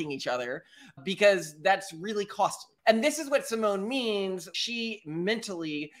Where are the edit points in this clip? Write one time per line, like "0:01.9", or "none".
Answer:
0:02.8
0:04.5